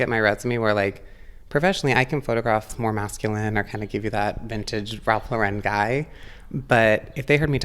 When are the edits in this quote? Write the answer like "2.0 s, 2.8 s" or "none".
2.7 s